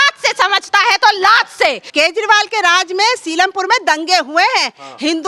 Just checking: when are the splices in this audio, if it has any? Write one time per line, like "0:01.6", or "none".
0:01.8